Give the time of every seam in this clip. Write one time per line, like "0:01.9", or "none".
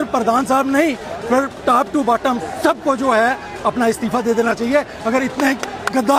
none